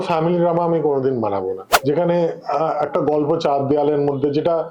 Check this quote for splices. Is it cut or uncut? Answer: cut